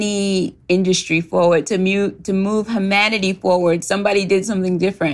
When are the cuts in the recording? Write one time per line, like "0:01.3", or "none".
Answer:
none